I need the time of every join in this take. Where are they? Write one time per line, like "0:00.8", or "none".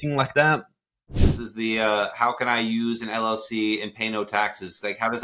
0:01.0